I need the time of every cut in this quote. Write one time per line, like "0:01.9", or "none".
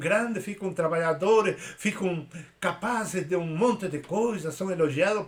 none